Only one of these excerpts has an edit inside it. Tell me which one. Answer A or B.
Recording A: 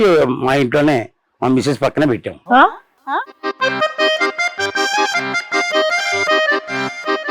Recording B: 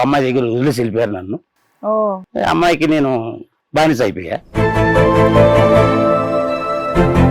B